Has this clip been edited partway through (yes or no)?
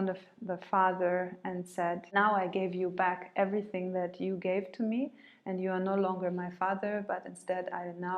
yes